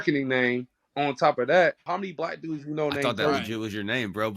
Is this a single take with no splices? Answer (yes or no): no